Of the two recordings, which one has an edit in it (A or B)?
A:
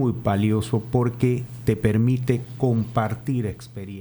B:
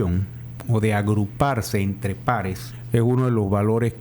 B